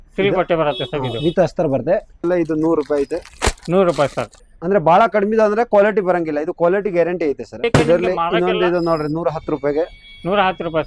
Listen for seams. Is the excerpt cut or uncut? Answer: cut